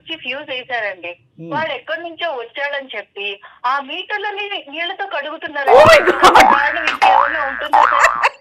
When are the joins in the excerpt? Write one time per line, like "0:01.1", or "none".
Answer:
none